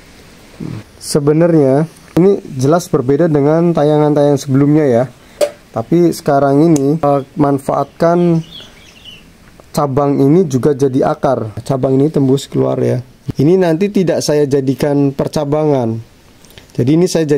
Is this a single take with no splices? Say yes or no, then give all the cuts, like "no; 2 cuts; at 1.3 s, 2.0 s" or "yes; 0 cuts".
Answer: no; 6 cuts; at 0.9 s, 2.2 s, 5.3 s, 7.0 s, 11.6 s, 13.1 s